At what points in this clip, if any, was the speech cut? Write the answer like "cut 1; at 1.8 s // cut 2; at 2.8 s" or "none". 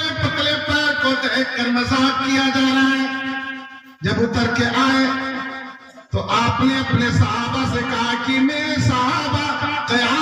none